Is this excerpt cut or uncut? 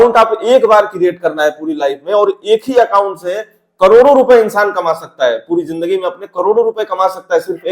uncut